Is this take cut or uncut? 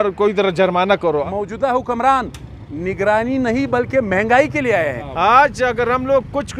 cut